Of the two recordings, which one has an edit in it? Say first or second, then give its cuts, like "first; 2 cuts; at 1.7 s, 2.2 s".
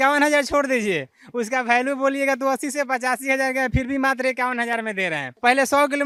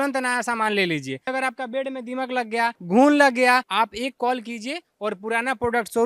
second; 3 cuts; at 1.3 s, 2.8 s, 3.7 s